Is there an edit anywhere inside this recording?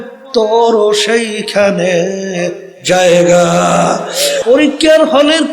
yes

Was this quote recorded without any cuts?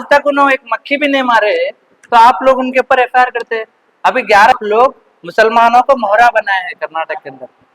no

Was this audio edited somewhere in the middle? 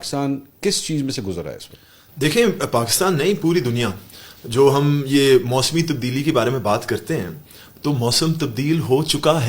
no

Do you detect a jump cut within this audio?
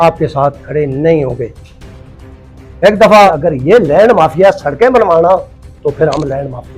yes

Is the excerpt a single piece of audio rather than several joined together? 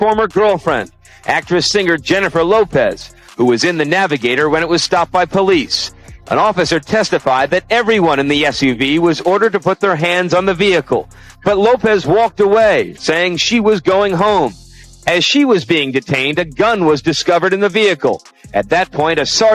yes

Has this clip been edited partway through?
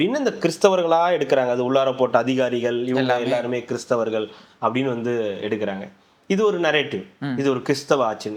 no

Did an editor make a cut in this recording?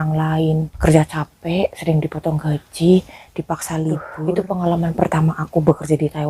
yes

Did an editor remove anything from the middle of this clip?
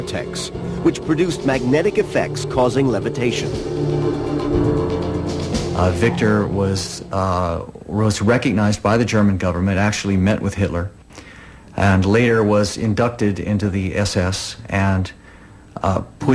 no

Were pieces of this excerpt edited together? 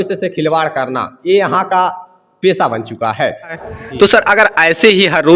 yes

